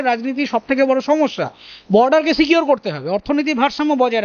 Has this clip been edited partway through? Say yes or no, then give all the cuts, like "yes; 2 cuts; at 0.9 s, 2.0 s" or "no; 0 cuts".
no; 0 cuts